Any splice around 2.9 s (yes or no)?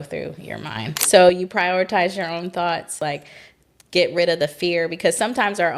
yes